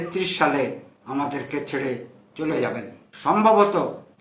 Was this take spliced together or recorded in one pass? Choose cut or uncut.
cut